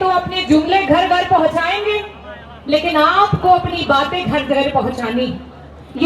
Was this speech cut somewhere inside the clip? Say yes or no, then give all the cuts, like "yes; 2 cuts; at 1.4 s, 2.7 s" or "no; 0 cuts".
no; 0 cuts